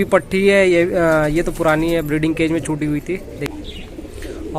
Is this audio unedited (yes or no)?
no